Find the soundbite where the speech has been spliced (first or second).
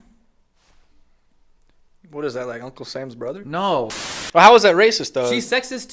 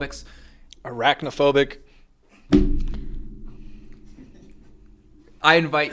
first